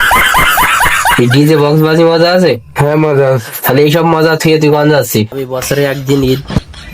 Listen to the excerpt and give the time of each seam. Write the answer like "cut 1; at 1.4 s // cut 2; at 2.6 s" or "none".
cut 1; at 5.4 s